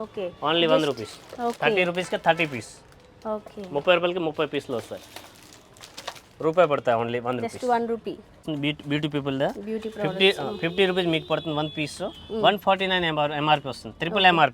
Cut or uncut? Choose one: uncut